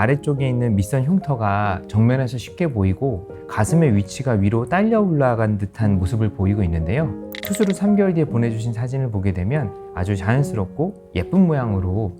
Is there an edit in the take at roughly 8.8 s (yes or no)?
no